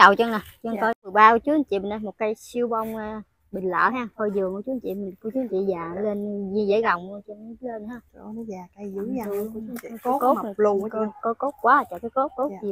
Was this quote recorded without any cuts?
no; 1 cut; at 1.1 s

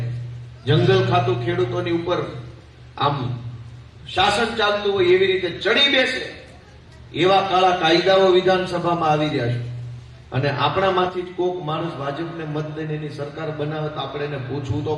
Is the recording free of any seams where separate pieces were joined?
yes; 0 cuts

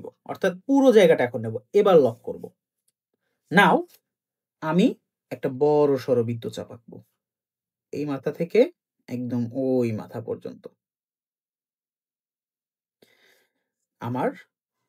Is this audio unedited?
yes; 0 cuts

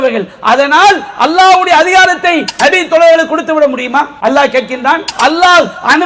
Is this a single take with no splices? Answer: no; 2 cuts; at 4.1 s, 5.1 s

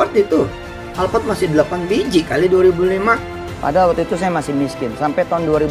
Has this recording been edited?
no; 0 cuts

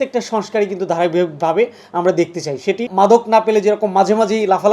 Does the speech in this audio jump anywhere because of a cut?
yes; 1 cut; at 2.9 s

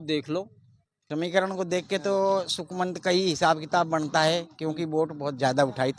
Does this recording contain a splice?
yes; 1 cut; at 1.2 s

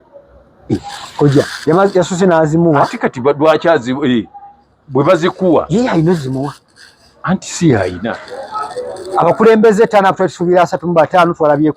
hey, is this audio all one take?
no; 1 cut; at 8.2 s

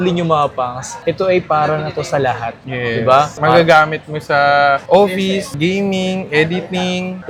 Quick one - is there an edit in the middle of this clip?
no; 0 cuts

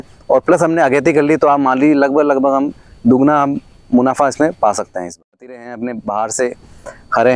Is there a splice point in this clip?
yes; 1 cut; at 5.2 s

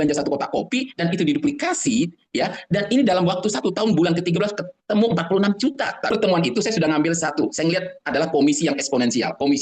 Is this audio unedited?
no; 1 cut; at 6.1 s

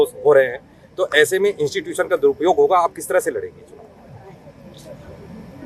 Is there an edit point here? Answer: no; 0 cuts

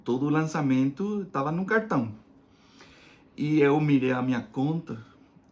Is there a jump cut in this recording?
no; 0 cuts

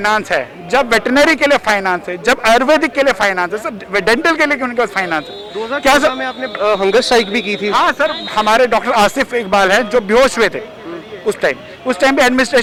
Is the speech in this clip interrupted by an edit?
no; 0 cuts

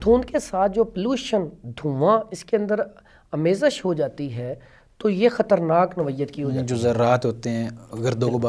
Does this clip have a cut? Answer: no; 0 cuts

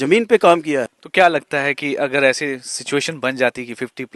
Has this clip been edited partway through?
no; 0 cuts

